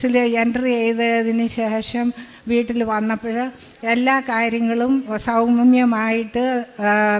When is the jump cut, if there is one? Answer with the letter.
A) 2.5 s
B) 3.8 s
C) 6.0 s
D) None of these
D